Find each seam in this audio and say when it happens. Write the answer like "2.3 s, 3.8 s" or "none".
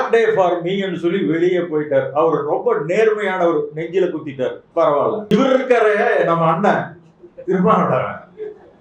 5.3 s